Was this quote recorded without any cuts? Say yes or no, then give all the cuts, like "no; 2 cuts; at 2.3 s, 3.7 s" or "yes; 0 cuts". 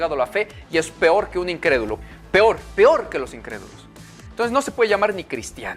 no; 1 cut; at 2.0 s